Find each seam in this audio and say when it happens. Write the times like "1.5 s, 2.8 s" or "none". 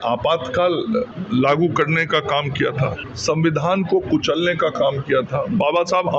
1.2 s, 3.1 s